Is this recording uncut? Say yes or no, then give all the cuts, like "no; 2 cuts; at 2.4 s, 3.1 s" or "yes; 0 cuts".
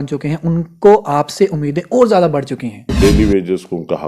no; 1 cut; at 2.9 s